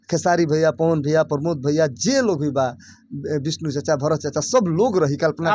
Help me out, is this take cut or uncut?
uncut